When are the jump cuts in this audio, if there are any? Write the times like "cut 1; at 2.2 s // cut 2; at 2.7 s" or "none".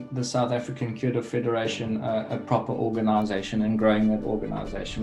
none